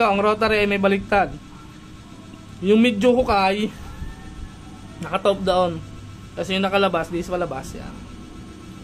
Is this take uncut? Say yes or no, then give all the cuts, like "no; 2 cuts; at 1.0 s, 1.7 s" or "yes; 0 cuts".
yes; 0 cuts